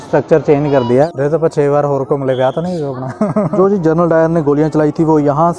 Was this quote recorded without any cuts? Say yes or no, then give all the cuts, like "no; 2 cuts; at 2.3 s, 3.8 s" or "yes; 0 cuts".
no; 2 cuts; at 1.1 s, 3.5 s